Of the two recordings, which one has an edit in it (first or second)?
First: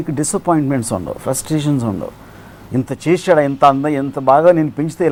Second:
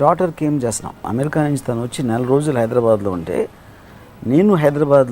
second